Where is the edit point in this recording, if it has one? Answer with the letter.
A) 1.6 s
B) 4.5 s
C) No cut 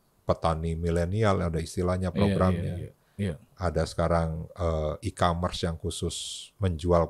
C